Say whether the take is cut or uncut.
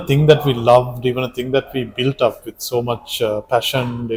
uncut